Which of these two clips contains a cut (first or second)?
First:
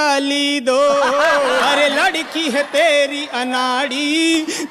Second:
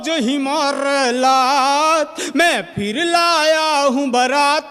first